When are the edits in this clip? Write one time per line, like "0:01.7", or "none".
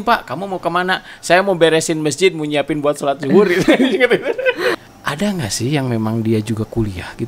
0:04.8